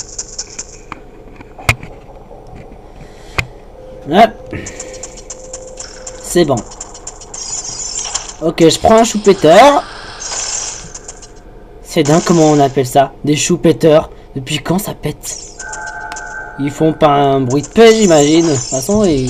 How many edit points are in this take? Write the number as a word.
one